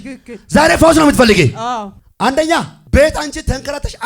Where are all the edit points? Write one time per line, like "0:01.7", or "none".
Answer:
0:02.0
0:02.8